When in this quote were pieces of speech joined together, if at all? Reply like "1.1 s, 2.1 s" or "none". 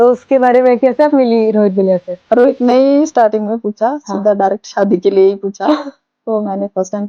none